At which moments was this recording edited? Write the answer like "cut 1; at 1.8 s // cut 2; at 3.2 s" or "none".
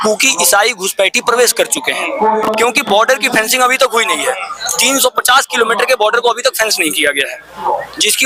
none